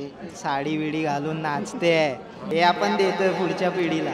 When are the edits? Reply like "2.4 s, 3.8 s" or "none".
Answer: 2.3 s